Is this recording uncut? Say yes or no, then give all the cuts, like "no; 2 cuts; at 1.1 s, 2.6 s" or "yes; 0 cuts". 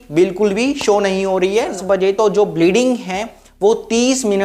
no; 1 cut; at 1.8 s